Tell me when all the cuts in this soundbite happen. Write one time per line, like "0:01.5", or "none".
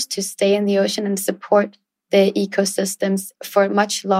0:03.3